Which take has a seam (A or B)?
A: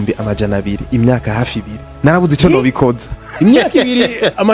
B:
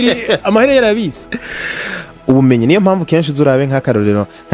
B